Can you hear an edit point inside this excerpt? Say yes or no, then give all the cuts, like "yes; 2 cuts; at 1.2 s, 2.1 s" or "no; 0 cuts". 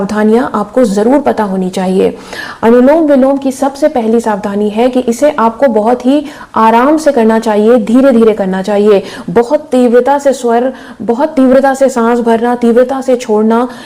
no; 0 cuts